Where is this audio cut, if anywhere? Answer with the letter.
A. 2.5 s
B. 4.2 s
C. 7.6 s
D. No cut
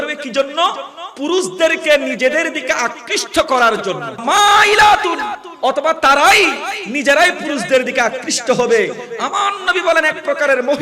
B